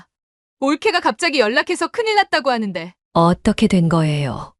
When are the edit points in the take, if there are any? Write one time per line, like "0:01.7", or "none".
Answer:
none